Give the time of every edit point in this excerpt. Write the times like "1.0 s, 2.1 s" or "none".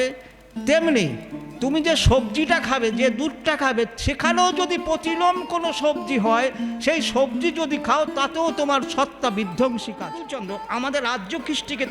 10.3 s